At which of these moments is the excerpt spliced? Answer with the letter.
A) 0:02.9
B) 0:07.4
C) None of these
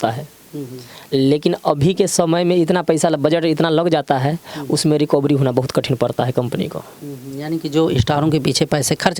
C